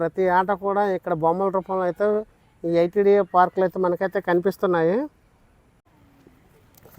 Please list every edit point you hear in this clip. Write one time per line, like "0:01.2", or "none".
0:05.8